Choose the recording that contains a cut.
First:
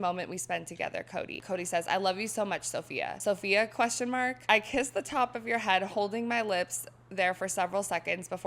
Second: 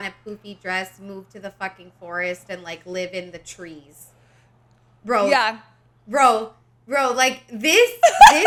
first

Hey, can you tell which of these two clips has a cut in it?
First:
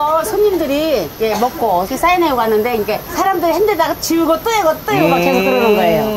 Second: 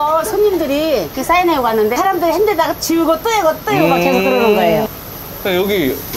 second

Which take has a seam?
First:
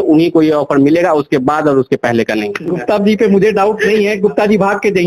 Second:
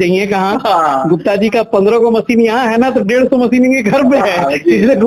first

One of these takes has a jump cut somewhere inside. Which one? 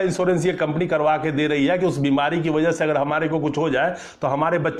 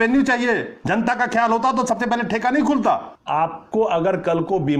second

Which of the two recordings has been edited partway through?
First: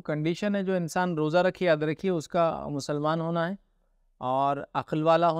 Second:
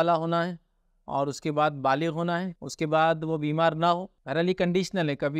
second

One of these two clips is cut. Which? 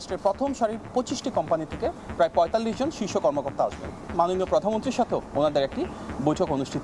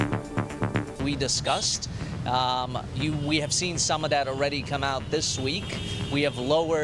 second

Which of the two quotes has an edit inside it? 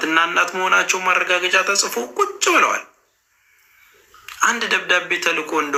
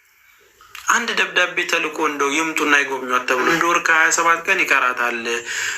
second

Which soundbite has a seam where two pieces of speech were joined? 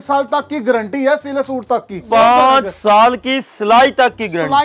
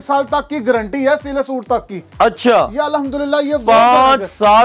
first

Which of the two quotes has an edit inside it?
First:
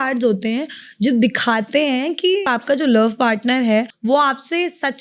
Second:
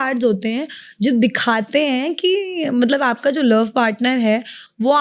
first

